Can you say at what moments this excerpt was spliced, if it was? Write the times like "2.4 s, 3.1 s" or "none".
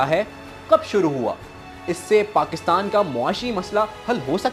none